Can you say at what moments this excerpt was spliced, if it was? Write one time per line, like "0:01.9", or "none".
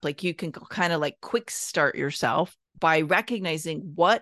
0:02.6